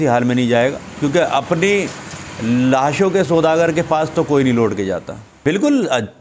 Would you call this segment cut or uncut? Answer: uncut